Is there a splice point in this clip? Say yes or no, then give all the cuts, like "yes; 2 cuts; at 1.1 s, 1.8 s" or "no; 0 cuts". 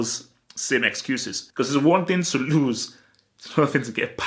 yes; 1 cut; at 1.4 s